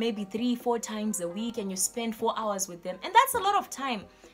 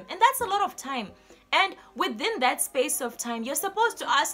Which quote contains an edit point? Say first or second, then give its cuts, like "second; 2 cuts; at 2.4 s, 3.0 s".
first; 1 cut; at 1.5 s